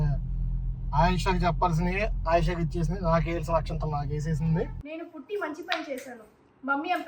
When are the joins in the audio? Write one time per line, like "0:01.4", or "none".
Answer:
0:04.8

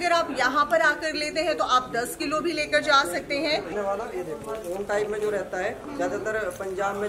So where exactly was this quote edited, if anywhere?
0:03.7

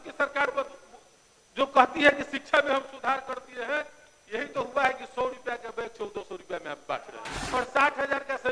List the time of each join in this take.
0:07.4

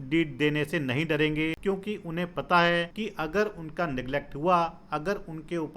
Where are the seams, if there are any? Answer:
0:01.6
0:02.9

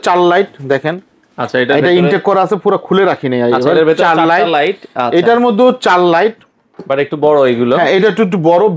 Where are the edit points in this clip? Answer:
none

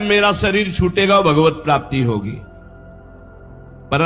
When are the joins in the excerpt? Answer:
none

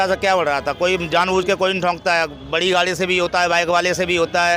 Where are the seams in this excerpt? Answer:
none

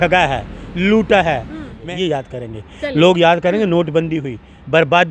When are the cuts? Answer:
0:01.7

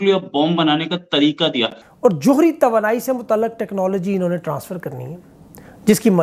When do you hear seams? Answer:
0:01.8

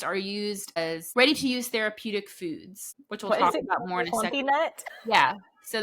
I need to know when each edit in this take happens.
0:01.0

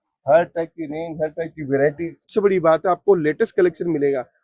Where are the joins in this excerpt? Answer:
0:02.2

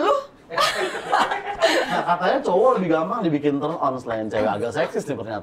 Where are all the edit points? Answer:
0:01.9

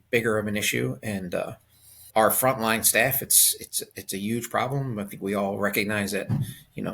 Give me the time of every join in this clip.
0:02.0

